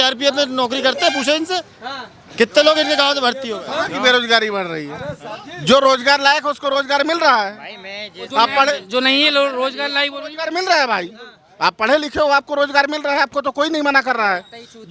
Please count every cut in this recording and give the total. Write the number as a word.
zero